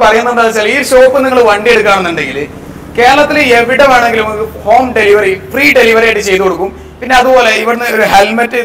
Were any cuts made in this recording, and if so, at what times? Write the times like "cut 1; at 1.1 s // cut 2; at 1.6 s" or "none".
none